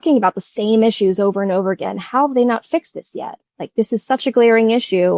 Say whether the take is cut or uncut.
uncut